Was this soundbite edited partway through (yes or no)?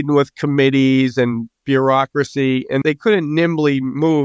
yes